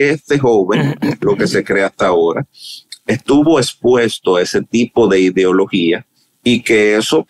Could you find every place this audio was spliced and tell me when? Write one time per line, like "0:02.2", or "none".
none